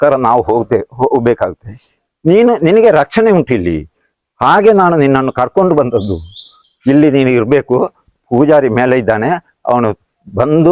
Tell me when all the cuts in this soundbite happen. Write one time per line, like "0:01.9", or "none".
none